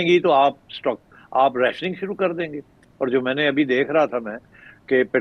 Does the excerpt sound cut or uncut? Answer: uncut